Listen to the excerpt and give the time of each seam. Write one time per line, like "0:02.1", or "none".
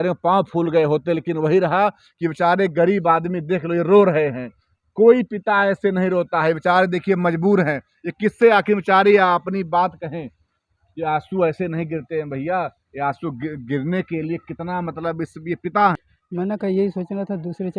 0:16.0

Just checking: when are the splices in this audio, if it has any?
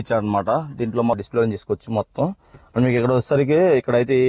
0:01.2

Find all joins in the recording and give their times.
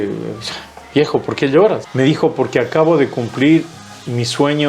0:01.8

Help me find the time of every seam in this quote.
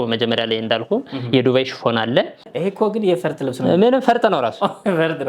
0:02.5

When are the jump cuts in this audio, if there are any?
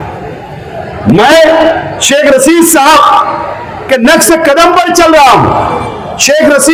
none

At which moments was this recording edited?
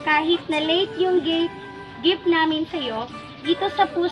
none

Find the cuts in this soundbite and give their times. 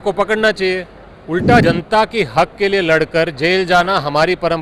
0:01.6

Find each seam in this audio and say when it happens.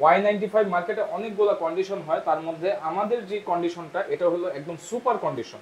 none

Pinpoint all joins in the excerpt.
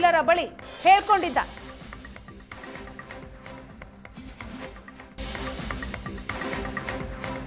0:05.2

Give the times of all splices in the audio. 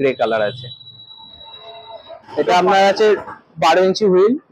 0:02.3

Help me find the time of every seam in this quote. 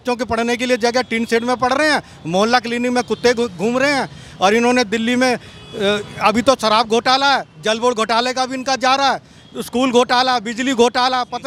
none

